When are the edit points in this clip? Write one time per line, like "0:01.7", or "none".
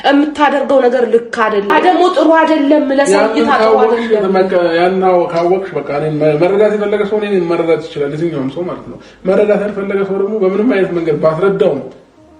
0:01.7